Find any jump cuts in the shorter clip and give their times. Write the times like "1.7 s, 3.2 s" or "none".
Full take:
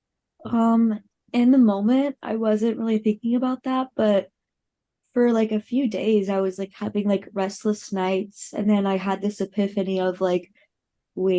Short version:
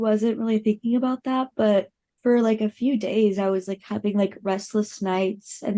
2.0 s